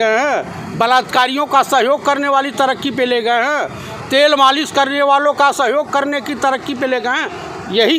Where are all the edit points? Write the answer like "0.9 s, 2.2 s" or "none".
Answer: none